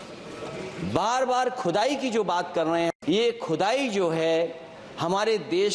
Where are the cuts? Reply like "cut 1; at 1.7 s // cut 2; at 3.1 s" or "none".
cut 1; at 2.9 s